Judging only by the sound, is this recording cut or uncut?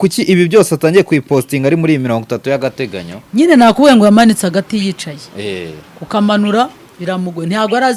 uncut